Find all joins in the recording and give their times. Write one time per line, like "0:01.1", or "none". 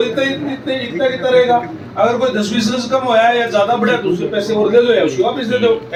none

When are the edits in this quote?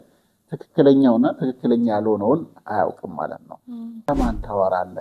0:04.1

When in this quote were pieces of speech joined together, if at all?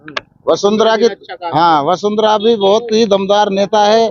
none

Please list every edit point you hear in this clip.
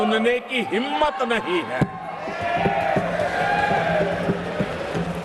none

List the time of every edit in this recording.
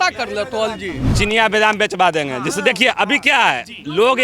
0:01.0

